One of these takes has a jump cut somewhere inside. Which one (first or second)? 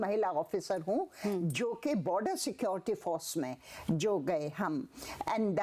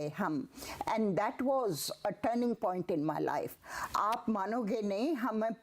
second